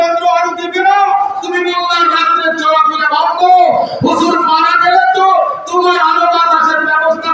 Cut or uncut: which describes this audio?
uncut